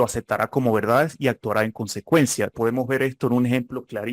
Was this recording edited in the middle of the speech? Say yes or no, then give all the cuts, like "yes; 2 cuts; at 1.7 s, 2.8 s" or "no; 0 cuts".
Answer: yes; 1 cut; at 2.5 s